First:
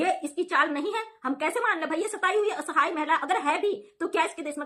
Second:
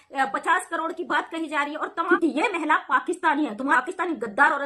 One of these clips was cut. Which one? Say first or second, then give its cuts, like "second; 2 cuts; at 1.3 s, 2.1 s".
second; 2 cuts; at 2.1 s, 3.8 s